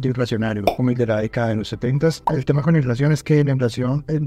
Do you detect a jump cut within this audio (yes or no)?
yes